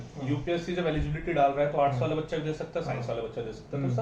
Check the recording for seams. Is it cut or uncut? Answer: uncut